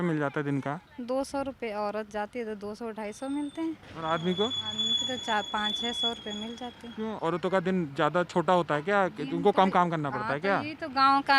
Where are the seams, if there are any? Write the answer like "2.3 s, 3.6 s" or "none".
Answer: 0.9 s, 3.9 s, 7.1 s

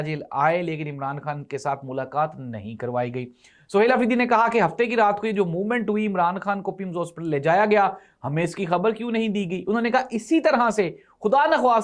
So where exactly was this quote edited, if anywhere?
none

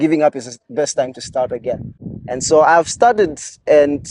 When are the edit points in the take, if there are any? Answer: none

